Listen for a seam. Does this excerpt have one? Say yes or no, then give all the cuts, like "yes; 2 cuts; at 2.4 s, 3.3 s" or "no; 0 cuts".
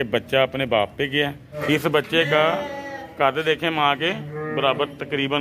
yes; 1 cut; at 1.6 s